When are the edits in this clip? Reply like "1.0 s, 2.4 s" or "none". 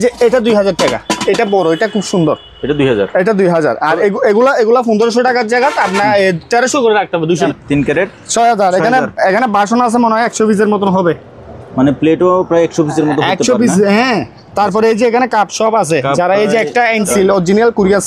7.4 s, 17.1 s